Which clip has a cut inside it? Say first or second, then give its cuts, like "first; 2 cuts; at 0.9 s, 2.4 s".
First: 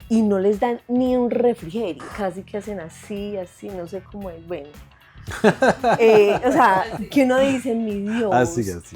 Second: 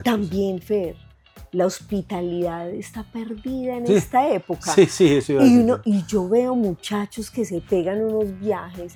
first; 1 cut; at 2.0 s